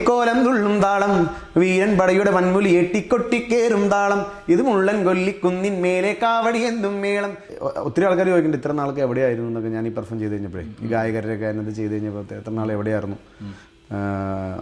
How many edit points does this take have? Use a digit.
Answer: 1